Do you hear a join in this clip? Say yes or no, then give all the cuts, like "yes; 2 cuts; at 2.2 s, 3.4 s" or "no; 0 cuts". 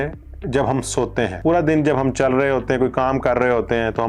yes; 1 cut; at 1.3 s